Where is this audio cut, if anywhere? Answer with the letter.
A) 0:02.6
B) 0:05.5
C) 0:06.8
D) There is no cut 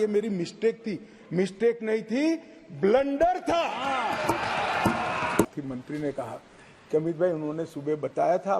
B